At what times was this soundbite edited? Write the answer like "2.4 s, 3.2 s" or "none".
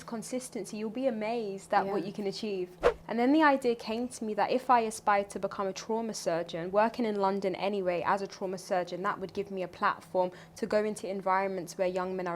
2.8 s